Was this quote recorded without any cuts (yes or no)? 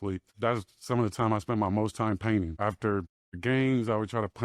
no